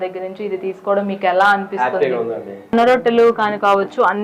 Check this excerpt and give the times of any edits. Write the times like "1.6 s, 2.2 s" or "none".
2.7 s

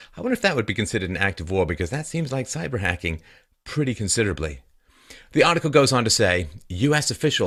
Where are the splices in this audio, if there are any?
none

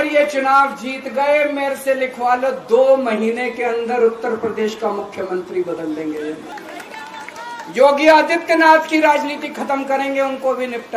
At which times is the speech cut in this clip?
6.6 s

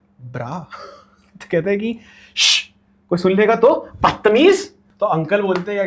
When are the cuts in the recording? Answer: 4.8 s

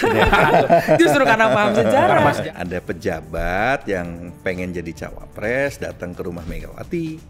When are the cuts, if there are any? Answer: 2.4 s

